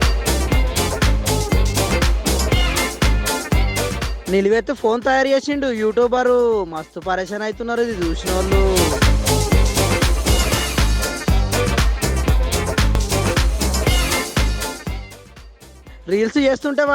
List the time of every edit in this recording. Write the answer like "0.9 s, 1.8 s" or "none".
13.0 s